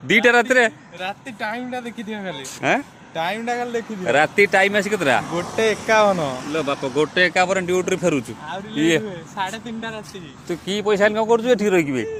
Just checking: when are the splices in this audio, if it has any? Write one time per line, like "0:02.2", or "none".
none